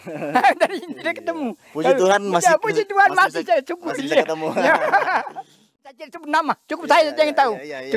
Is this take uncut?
no; 1 cut; at 6.0 s

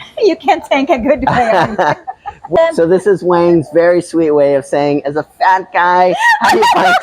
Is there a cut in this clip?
yes; 1 cut; at 2.6 s

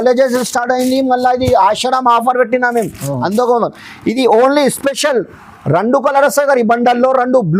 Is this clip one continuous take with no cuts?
yes; 0 cuts

